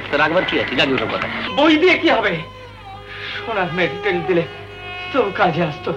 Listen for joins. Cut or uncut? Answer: cut